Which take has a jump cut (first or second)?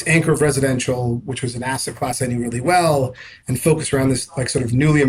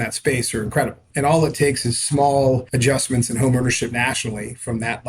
second